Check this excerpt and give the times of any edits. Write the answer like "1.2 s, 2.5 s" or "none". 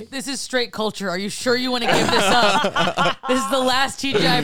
none